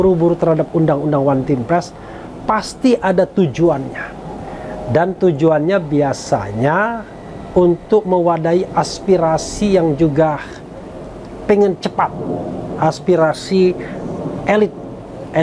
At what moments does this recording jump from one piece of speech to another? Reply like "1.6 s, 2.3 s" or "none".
none